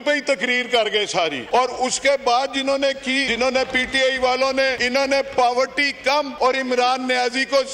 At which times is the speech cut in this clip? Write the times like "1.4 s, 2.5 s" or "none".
1.4 s, 3.3 s, 4.8 s, 6.3 s